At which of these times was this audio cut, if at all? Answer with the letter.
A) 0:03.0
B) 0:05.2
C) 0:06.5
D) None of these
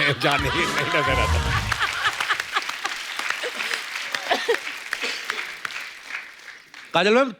D